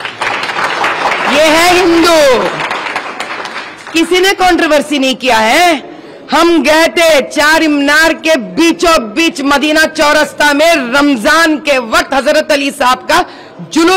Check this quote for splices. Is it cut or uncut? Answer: uncut